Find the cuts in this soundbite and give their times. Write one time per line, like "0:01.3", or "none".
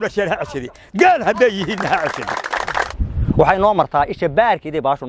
0:03.0